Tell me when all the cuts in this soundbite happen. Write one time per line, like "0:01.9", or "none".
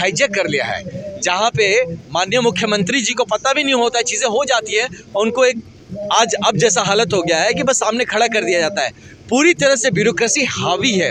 none